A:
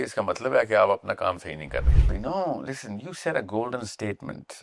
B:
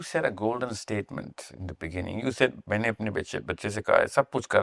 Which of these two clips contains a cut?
A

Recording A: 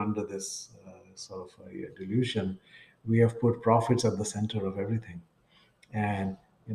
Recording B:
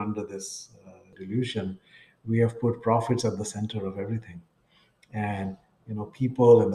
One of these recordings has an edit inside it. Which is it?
B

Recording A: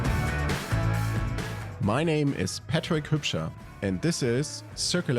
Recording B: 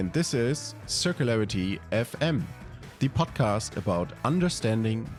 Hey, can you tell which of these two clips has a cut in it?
A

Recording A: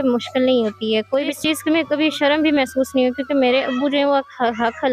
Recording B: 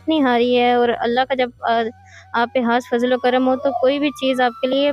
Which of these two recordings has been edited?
A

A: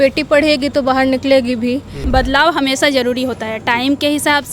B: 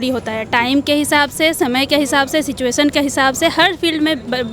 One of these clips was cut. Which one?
A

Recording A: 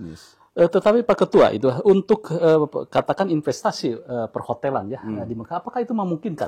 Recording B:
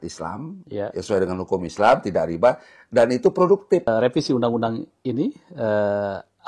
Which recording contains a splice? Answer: B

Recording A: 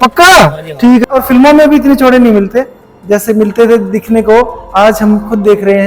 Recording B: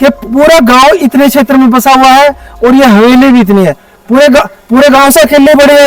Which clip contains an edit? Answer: A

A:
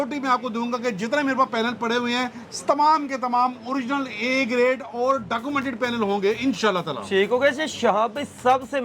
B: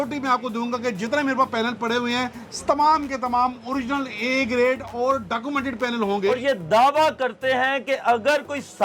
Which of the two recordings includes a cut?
B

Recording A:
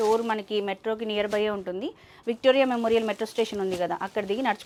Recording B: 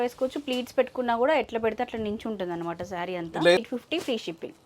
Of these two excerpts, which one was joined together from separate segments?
B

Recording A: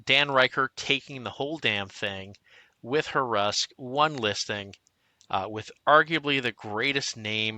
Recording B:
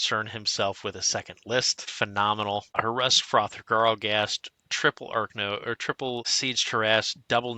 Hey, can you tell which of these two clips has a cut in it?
B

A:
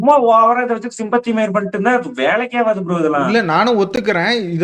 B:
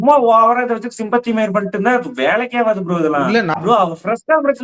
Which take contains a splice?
B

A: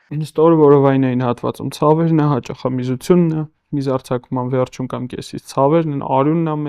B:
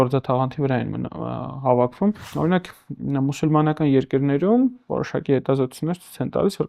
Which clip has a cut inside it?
B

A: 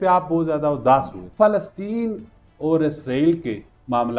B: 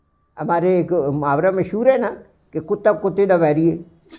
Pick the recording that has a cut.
A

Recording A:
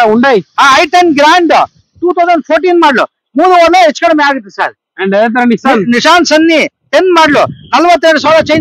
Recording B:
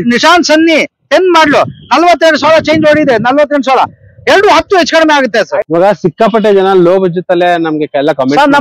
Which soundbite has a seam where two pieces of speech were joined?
B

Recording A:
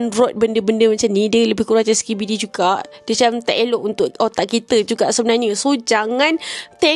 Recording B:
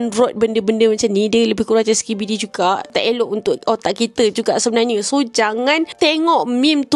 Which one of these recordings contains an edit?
B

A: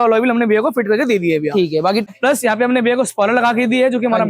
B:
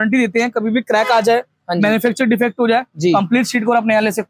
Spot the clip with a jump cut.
A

